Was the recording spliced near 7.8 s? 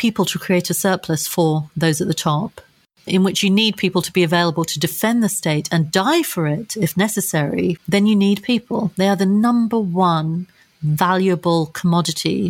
yes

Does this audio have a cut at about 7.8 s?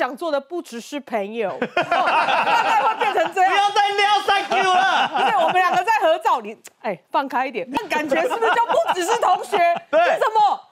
yes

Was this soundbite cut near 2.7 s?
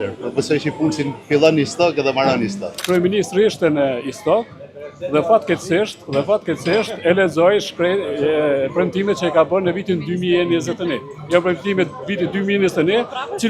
yes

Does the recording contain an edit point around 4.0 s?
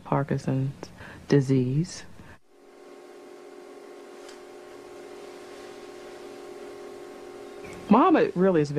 yes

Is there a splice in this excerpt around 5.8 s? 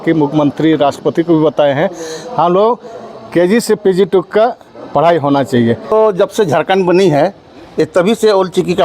yes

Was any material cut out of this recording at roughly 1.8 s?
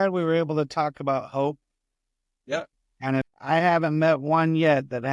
no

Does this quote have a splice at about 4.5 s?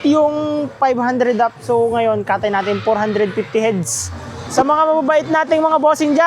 yes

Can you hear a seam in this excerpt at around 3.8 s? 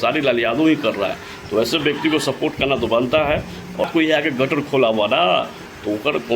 yes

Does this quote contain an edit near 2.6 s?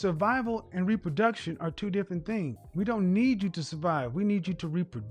yes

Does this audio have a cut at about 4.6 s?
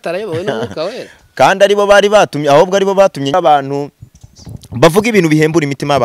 no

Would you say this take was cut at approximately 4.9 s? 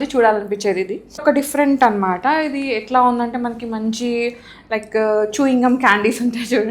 no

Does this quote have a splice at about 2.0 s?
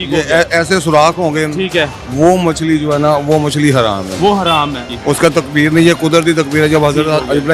no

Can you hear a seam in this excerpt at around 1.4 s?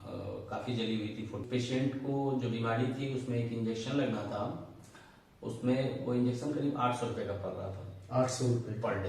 yes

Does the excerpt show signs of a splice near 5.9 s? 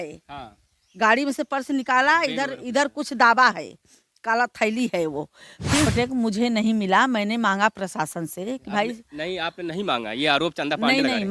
yes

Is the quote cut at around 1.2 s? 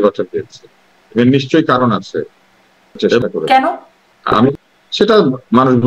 no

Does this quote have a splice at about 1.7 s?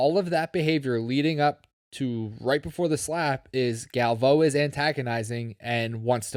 no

